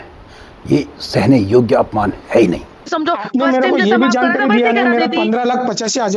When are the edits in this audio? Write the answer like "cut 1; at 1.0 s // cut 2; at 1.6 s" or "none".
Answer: cut 1; at 2.9 s